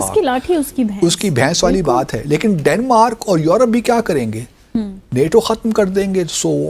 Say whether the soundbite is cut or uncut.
uncut